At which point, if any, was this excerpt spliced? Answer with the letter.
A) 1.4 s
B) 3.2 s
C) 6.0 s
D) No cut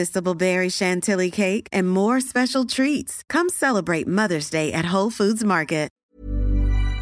C